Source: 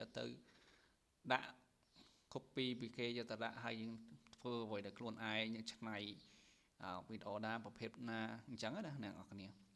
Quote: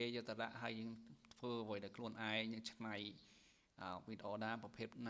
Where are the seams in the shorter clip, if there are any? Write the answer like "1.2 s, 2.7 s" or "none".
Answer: none